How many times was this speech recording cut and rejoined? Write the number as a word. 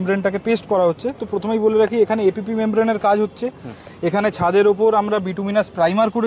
zero